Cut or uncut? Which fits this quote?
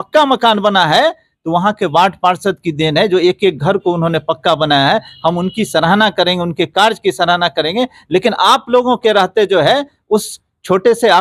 uncut